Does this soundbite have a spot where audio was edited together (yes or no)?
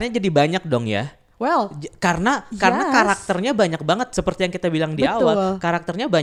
no